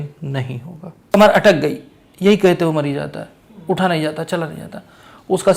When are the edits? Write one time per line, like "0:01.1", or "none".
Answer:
0:01.0